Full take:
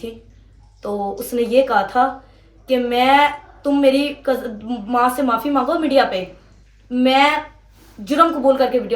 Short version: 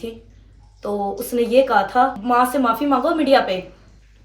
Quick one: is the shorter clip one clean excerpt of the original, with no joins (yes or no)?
no